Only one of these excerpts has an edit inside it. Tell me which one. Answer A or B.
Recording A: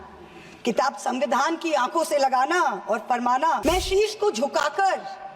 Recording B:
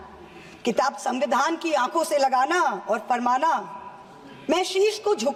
A